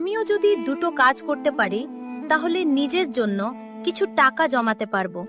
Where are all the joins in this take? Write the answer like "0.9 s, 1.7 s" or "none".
none